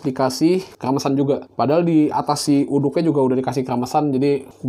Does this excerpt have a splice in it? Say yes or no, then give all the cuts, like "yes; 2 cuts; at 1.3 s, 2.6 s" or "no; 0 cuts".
yes; 1 cut; at 1.0 s